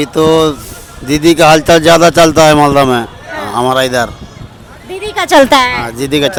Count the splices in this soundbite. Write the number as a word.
zero